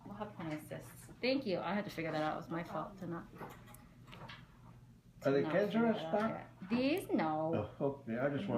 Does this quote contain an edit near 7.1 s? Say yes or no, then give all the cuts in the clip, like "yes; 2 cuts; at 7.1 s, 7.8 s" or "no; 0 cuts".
no; 1 cut; at 4.7 s